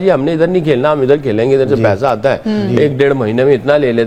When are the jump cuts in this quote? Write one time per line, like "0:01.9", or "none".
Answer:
none

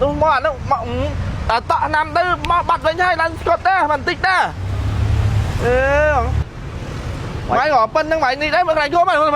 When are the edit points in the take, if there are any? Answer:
0:06.4

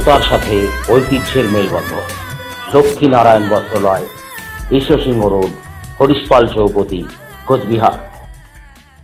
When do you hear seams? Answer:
none

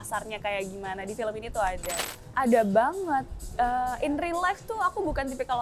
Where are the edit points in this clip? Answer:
0:02.0

